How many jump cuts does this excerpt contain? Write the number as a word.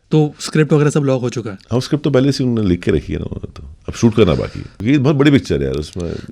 one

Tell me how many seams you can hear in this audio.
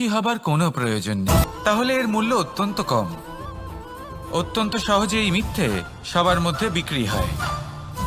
one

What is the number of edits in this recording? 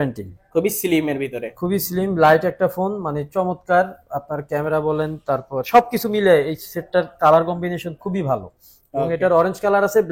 zero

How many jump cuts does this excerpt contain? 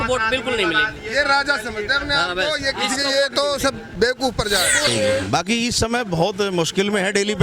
one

